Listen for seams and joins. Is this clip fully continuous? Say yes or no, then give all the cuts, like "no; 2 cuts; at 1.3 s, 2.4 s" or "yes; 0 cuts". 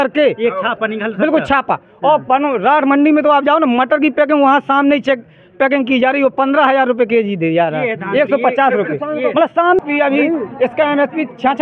no; 1 cut; at 9.8 s